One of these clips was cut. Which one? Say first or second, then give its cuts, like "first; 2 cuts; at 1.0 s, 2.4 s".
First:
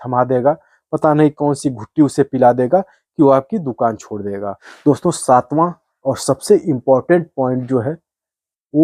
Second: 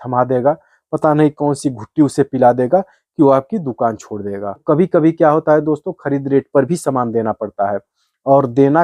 second; 1 cut; at 4.6 s